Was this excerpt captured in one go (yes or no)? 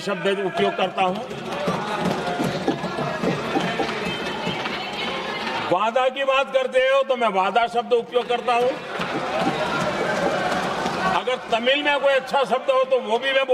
yes